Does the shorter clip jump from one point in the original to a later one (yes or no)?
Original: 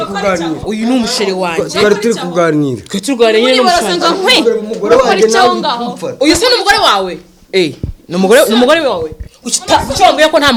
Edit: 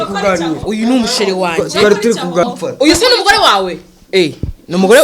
yes